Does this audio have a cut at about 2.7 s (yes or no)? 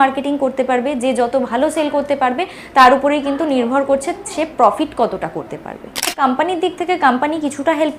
no